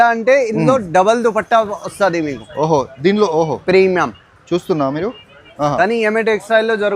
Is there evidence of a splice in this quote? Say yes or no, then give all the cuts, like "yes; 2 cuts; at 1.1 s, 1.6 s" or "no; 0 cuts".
yes; 1 cut; at 5.4 s